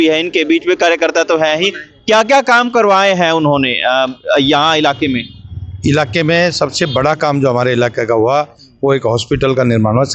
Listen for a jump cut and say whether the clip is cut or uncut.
uncut